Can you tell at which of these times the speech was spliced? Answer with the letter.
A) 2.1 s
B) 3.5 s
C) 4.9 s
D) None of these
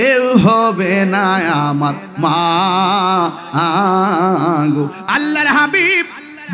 C